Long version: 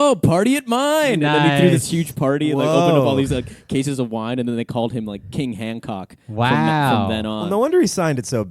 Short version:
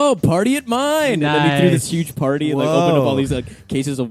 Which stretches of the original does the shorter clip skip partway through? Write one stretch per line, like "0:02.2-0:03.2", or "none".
none